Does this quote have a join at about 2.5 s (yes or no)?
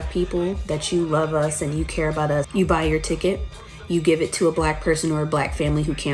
yes